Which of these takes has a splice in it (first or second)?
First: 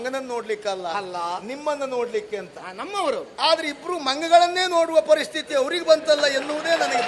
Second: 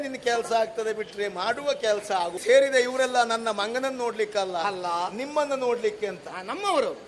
second